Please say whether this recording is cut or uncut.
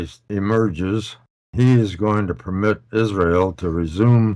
uncut